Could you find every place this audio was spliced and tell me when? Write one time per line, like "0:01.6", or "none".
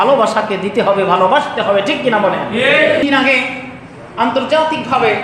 0:03.0